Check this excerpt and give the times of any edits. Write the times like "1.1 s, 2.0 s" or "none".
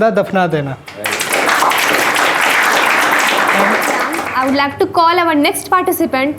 4.2 s

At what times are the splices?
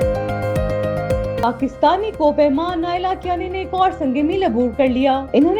1.4 s

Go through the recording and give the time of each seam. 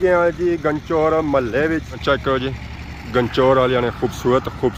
none

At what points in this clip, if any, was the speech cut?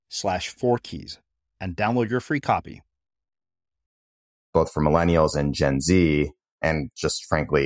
4.5 s, 6.6 s

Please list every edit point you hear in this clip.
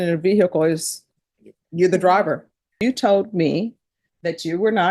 2.7 s

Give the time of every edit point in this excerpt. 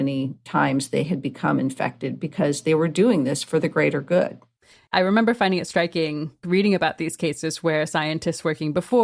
4.7 s, 6.4 s

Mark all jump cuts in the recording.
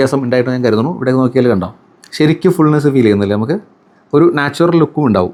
none

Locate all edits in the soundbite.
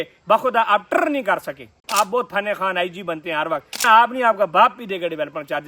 1.8 s, 3.8 s

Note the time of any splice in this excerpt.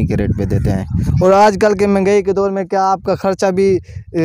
1.0 s

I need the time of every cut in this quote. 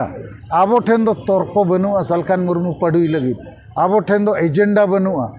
none

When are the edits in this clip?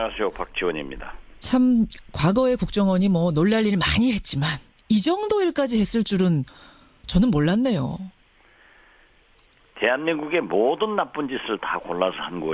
5.9 s

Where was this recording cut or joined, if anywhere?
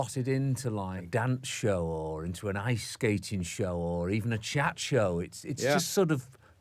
1.0 s

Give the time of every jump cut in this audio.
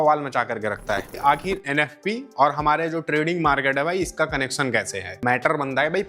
1.2 s, 5.2 s

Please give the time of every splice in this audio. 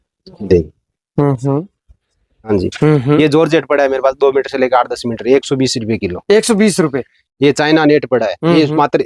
2.4 s

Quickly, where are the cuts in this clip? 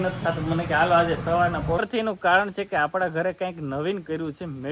1.8 s

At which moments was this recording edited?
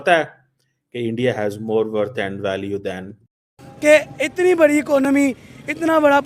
3.6 s

